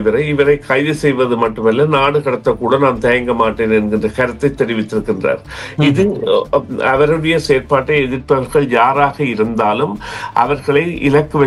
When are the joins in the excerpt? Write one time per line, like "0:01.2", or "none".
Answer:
none